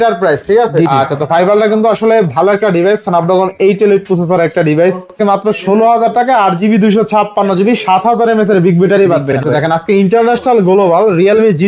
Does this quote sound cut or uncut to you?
cut